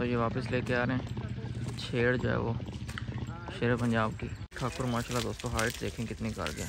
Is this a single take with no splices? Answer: no; 1 cut; at 4.5 s

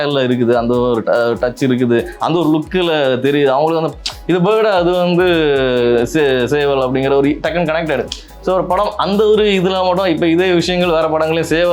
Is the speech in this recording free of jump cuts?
yes; 0 cuts

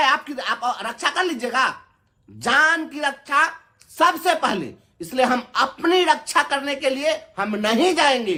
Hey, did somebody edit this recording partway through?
no; 0 cuts

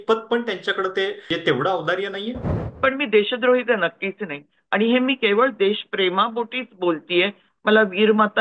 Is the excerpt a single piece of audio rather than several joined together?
no; 2 cuts; at 1.2 s, 2.6 s

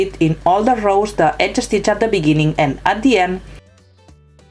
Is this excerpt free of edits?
no; 1 cut; at 3.6 s

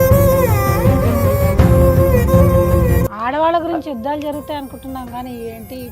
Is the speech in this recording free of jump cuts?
no; 1 cut; at 3.1 s

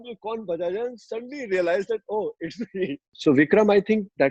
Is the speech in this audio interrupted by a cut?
yes; 1 cut; at 3.1 s

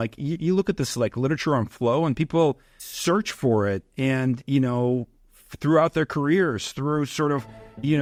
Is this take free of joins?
yes; 0 cuts

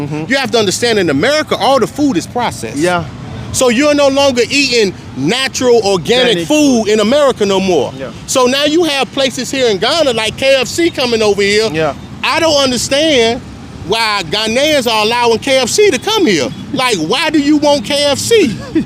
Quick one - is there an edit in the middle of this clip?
no; 0 cuts

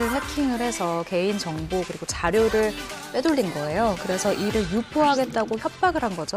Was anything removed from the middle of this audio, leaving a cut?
no; 0 cuts

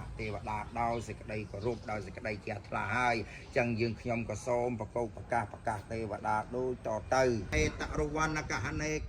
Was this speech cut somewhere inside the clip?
yes; 1 cut; at 7.6 s

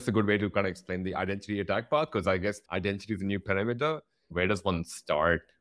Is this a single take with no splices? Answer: no; 2 cuts; at 2.6 s, 4.3 s

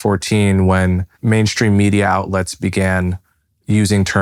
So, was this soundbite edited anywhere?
yes; 1 cut; at 1.1 s

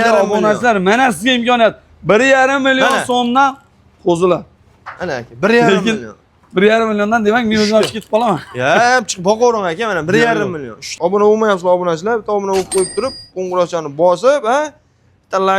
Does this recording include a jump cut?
yes; 1 cut; at 10.9 s

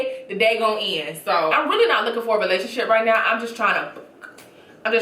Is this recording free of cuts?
no; 1 cut; at 1.5 s

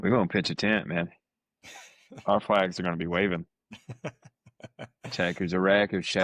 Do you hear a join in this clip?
no; 0 cuts

